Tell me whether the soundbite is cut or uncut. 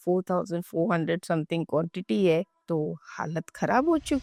uncut